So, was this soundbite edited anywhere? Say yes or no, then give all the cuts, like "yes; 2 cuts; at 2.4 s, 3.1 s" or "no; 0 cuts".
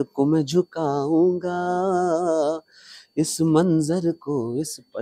no; 0 cuts